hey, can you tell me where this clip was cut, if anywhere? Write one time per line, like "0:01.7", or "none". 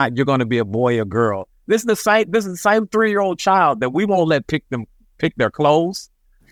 none